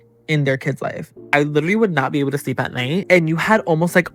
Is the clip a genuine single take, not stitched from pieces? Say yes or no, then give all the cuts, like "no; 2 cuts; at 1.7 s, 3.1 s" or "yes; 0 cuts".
no; 2 cuts; at 1.3 s, 3.0 s